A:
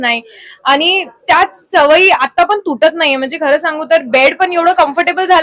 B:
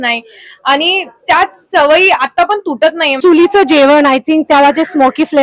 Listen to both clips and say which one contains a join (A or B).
B